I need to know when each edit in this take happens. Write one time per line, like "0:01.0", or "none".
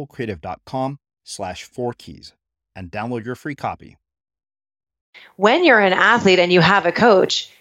0:05.3